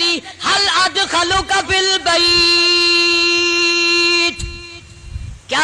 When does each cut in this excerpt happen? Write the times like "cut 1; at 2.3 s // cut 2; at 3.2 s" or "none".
none